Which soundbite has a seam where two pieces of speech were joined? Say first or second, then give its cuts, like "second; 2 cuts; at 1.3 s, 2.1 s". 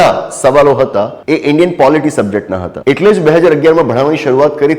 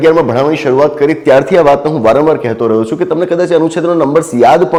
first; 2 cuts; at 1.2 s, 2.7 s